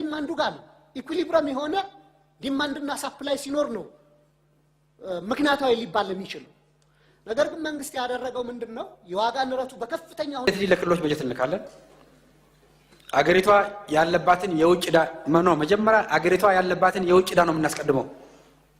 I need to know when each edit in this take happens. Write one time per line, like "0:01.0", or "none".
0:10.5